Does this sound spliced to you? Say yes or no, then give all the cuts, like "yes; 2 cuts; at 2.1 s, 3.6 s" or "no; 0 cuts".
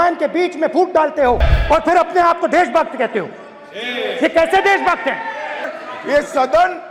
yes; 2 cuts; at 1.5 s, 5.7 s